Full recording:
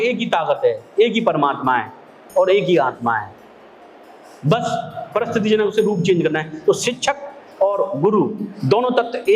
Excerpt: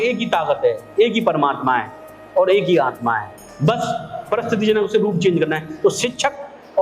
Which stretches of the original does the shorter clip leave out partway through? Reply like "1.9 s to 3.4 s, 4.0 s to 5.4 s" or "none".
3.4 s to 4.2 s